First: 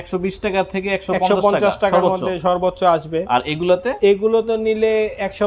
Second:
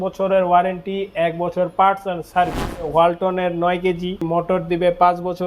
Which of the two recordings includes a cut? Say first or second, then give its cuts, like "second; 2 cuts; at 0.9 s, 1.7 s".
second; 2 cuts; at 2.9 s, 4.2 s